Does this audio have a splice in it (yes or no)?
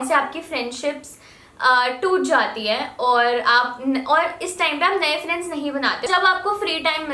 yes